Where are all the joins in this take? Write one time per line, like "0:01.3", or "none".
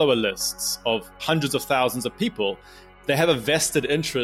0:01.2
0:02.9